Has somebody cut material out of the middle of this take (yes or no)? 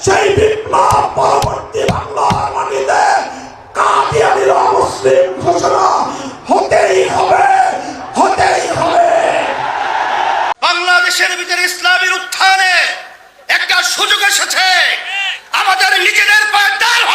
yes